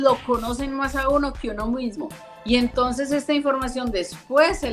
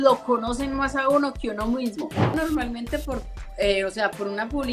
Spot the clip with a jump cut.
second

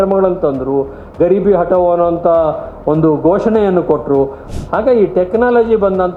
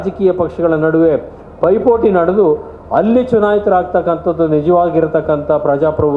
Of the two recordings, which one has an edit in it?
first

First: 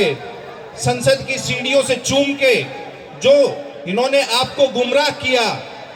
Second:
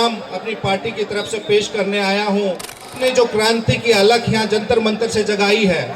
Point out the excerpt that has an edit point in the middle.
second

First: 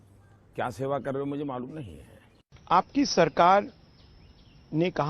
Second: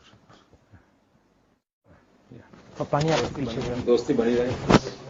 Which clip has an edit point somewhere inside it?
first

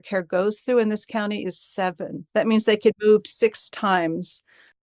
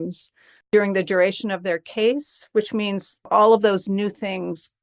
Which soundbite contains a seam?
first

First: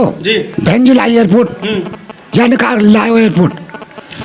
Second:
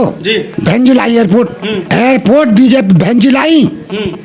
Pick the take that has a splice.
second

